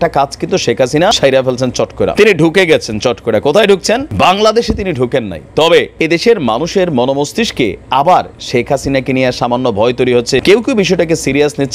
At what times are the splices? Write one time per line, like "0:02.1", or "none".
0:01.2
0:02.1
0:04.1
0:05.9
0:10.4